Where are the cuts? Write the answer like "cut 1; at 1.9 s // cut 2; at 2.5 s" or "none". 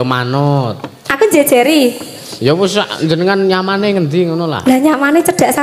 none